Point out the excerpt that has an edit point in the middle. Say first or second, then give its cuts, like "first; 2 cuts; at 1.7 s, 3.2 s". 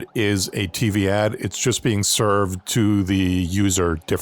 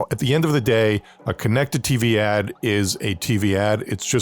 second; 1 cut; at 1.2 s